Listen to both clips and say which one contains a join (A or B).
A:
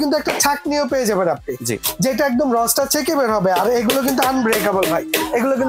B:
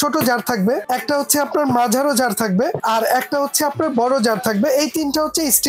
B